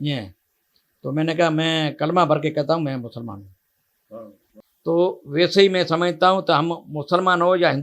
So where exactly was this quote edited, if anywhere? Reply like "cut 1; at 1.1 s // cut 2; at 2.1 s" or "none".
cut 1; at 4.5 s